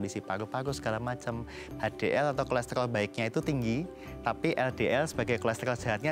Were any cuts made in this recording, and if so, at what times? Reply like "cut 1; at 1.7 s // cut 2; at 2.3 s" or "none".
cut 1; at 1.6 s

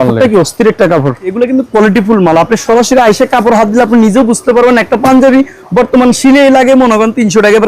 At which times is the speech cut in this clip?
cut 1; at 1.3 s

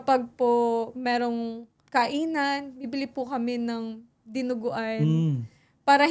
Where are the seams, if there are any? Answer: cut 1; at 1.8 s

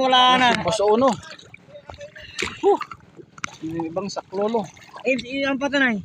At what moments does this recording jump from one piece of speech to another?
cut 1; at 3.5 s

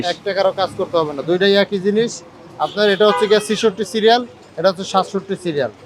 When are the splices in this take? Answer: none

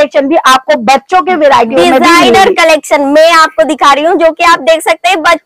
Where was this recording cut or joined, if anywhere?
none

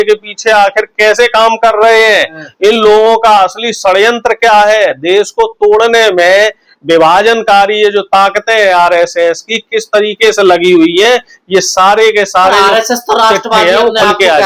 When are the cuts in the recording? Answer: none

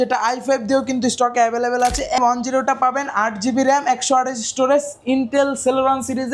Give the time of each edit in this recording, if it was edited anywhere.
cut 1; at 2.2 s

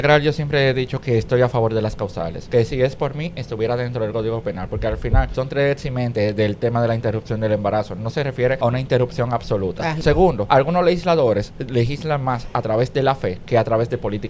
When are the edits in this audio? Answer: cut 1; at 2.4 s // cut 2; at 5.3 s // cut 3; at 8.6 s // cut 4; at 10.1 s

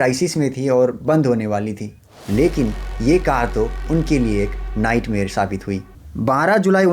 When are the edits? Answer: cut 1; at 1.9 s // cut 2; at 5.8 s

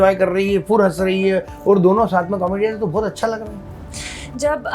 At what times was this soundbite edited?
none

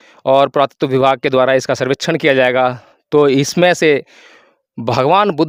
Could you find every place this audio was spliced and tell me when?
none

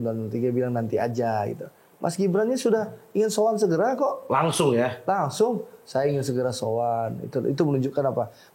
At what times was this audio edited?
none

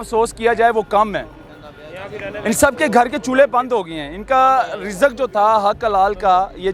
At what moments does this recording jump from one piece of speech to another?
none

